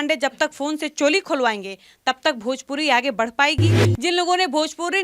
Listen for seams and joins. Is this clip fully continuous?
no; 1 cut; at 3.8 s

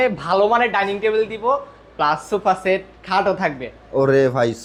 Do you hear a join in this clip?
no; 0 cuts

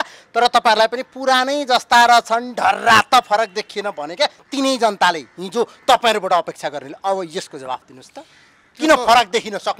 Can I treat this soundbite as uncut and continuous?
yes; 0 cuts

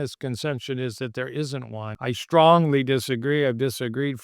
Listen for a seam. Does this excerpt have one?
yes; 1 cut; at 1.9 s

